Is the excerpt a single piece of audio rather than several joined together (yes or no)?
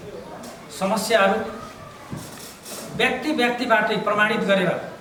yes